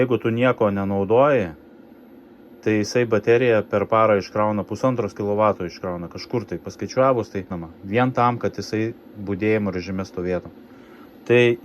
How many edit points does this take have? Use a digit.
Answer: 0